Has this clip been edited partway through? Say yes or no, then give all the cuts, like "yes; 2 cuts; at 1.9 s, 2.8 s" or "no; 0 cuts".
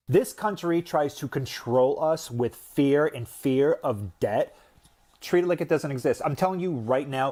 no; 0 cuts